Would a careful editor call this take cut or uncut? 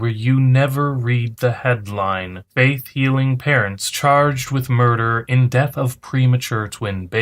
cut